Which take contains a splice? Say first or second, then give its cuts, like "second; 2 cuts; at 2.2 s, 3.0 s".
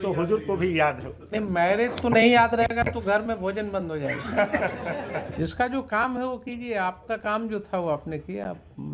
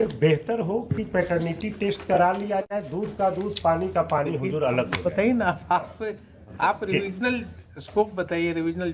first; 1 cut; at 5.4 s